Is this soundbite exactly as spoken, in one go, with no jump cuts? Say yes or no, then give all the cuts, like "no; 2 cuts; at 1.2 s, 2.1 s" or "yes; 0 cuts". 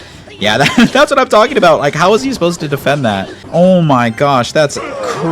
no; 1 cut; at 3.4 s